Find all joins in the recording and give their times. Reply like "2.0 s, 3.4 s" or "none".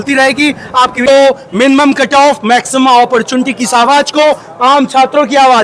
1.1 s